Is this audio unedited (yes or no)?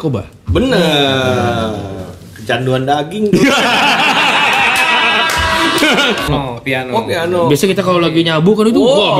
no